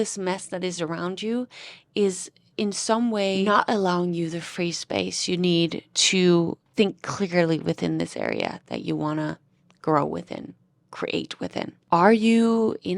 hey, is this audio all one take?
no; 3 cuts; at 3.4 s, 6.6 s, 11.8 s

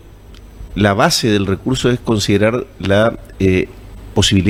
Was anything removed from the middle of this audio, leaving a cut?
no; 0 cuts

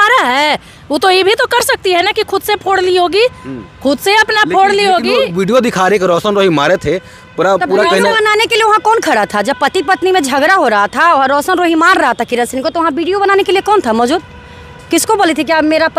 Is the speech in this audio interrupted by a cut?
no; 0 cuts

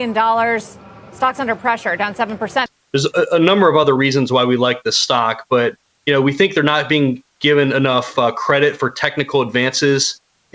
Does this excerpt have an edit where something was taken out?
yes; 1 cut; at 2.7 s

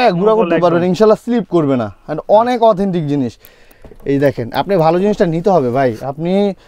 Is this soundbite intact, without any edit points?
yes; 0 cuts

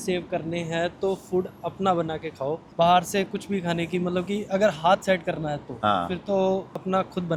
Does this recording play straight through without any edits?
yes; 0 cuts

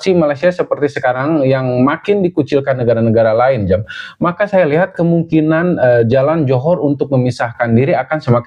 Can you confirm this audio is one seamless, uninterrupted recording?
yes; 0 cuts

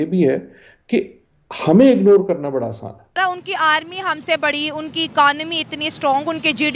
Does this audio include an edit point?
yes; 1 cut; at 3.2 s

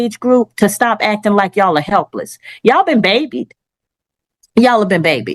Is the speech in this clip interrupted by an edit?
no; 0 cuts

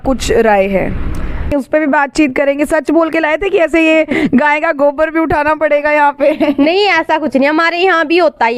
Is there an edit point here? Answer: yes; 1 cut; at 1.5 s

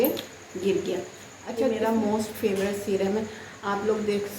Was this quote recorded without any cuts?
no; 1 cut; at 1.7 s

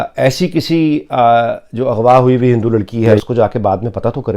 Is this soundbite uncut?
no; 1 cut; at 3.2 s

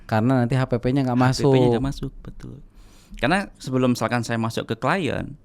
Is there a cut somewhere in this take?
no; 0 cuts

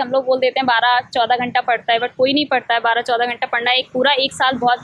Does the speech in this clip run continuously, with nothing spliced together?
yes; 0 cuts

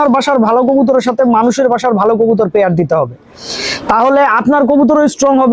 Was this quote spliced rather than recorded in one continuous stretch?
no; 0 cuts

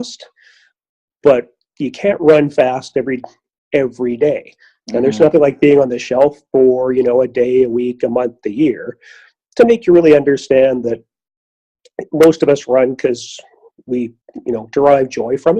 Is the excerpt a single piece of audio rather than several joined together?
no; 1 cut; at 14.3 s

